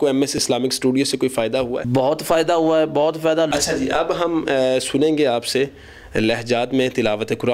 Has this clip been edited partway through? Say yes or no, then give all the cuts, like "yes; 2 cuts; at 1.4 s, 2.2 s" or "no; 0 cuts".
yes; 2 cuts; at 1.8 s, 3.5 s